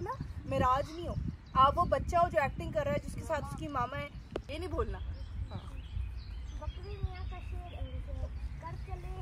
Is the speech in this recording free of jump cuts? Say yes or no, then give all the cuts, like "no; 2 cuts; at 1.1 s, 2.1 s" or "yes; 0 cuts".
yes; 0 cuts